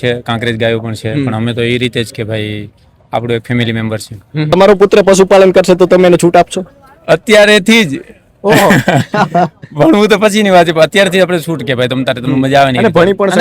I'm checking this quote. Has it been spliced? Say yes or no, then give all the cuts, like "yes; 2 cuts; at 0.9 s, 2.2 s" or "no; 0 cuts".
yes; 1 cut; at 4.5 s